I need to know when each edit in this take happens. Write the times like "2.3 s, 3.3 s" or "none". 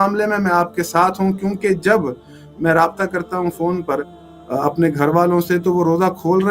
none